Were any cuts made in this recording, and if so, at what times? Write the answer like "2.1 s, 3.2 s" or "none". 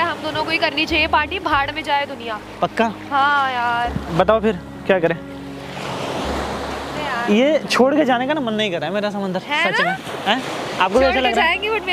none